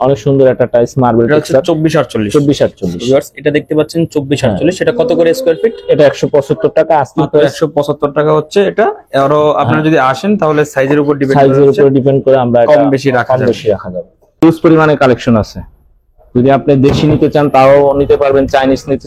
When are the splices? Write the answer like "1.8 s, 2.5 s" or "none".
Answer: 14.4 s